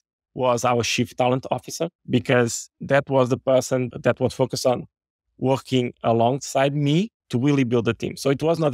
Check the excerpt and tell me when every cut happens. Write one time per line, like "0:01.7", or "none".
0:02.0
0:02.7
0:03.9
0:07.2